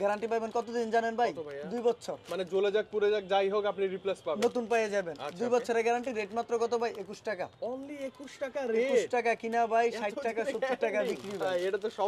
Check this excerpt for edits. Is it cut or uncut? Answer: uncut